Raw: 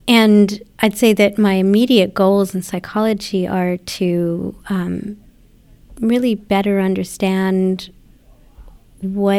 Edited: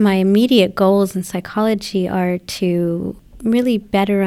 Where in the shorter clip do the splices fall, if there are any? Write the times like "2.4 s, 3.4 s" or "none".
3.2 s